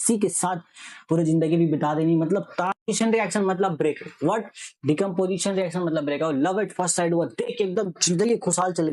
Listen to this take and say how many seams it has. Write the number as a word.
one